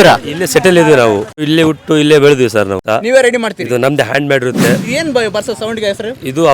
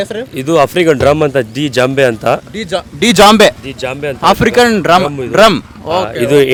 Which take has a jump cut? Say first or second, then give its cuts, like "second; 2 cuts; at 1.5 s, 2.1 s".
first; 3 cuts; at 1.4 s, 2.8 s, 4.8 s